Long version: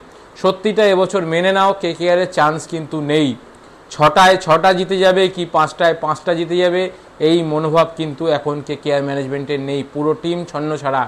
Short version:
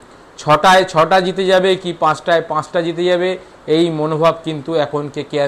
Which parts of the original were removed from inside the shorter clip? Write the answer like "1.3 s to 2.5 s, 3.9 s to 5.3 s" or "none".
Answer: none